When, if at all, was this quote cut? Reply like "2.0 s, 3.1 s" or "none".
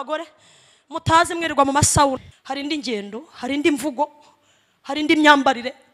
2.3 s